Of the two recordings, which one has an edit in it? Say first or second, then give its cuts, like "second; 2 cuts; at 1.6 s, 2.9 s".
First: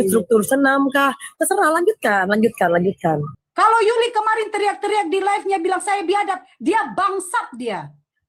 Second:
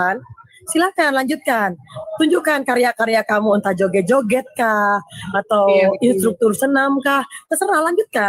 first; 1 cut; at 3.3 s